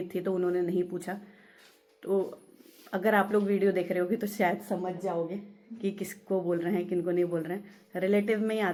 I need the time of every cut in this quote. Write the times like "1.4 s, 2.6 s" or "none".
none